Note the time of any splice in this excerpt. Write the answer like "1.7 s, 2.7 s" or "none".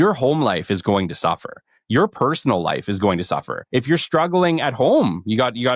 3.6 s